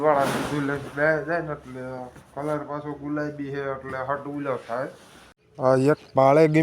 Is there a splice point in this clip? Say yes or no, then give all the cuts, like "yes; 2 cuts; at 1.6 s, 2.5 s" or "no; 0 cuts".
yes; 1 cut; at 5.4 s